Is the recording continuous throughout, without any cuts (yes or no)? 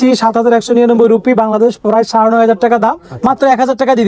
yes